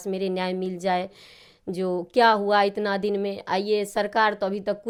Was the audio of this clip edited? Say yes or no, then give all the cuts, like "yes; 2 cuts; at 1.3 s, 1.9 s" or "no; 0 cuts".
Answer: no; 0 cuts